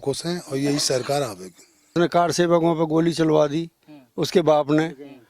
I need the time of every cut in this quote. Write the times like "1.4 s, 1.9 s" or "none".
1.9 s